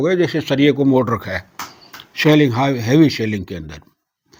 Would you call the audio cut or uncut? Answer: uncut